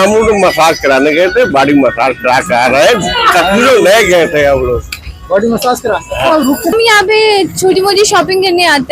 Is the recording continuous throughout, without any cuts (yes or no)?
no